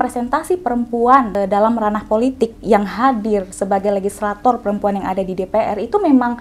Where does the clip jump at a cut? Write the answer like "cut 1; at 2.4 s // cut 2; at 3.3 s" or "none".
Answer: cut 1; at 1.3 s